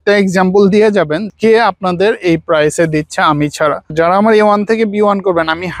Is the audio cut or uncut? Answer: cut